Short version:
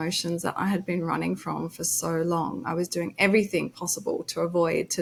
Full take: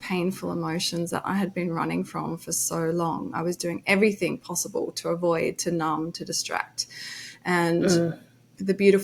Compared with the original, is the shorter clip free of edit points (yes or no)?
yes